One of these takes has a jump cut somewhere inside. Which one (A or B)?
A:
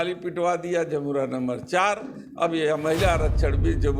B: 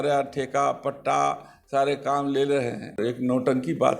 B